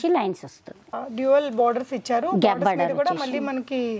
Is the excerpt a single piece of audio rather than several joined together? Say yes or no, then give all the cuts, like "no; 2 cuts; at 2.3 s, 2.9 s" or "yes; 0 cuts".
no; 1 cut; at 1.0 s